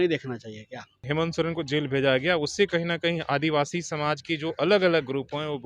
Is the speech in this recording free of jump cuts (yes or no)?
no